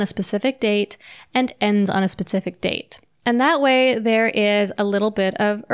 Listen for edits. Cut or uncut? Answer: uncut